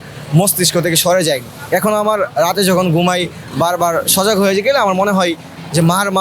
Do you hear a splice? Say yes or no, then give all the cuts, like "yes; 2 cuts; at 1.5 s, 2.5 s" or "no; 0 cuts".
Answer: no; 0 cuts